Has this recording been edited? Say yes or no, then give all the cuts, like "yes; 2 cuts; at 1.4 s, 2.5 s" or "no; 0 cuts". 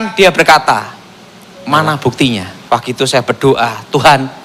yes; 1 cut; at 2.5 s